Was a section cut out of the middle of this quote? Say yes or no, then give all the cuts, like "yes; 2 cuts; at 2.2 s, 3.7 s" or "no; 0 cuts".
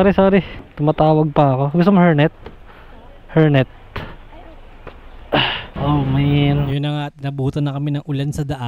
yes; 1 cut; at 5.7 s